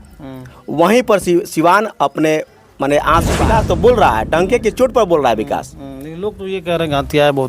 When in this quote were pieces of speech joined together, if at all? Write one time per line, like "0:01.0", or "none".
0:03.4